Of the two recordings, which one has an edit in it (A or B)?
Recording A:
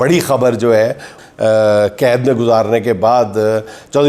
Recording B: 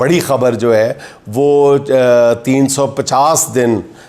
A